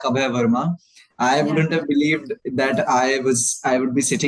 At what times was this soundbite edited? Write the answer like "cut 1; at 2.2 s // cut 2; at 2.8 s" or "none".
none

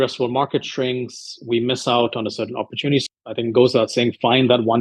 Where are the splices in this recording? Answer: cut 1; at 3.0 s

